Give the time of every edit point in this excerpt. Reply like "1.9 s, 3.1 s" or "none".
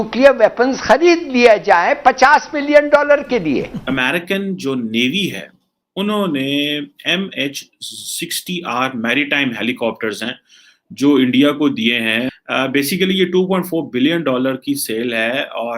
3.8 s, 12.3 s